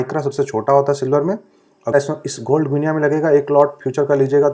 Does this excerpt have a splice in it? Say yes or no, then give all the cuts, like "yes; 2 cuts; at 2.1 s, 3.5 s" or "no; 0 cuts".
yes; 1 cut; at 1.9 s